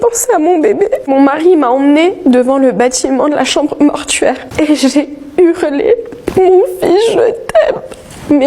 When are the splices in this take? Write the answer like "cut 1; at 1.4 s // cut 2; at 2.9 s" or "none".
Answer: cut 1; at 1.1 s